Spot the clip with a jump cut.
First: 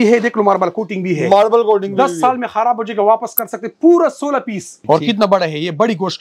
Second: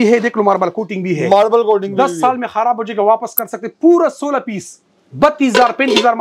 first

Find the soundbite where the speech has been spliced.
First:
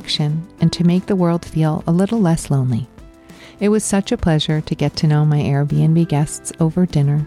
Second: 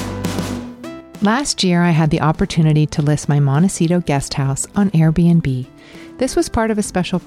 second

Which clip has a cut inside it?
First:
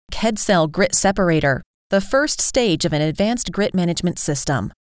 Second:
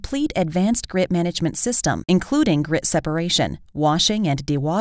first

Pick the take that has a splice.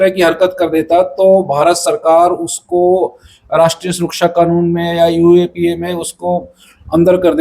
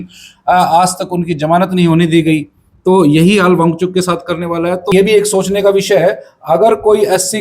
second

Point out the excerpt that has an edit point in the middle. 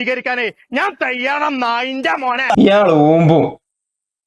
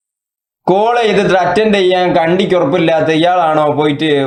first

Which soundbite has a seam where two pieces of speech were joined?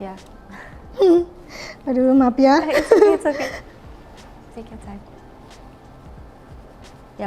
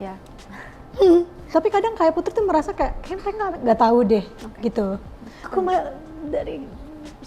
second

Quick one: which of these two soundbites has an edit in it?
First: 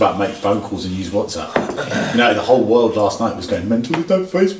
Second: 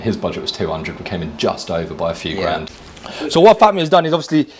second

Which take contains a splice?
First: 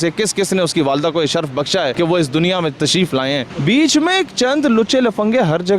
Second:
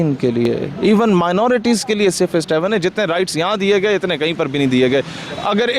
first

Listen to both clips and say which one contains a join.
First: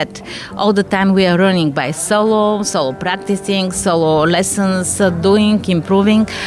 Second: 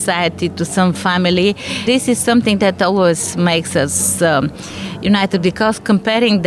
second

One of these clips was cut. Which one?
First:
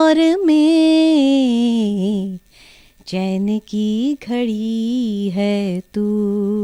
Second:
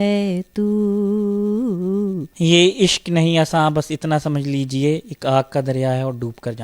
second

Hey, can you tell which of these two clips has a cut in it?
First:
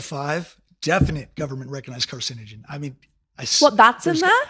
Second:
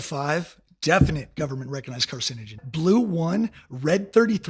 second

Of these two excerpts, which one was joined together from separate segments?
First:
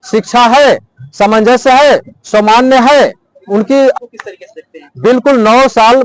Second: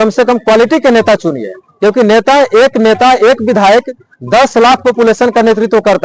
first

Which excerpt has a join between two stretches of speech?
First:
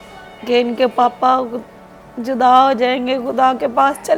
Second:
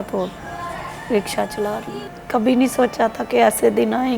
second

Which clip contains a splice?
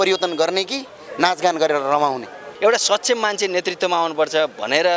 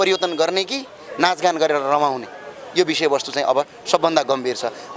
first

